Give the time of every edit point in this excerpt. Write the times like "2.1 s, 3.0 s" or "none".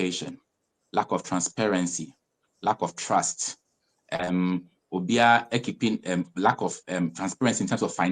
none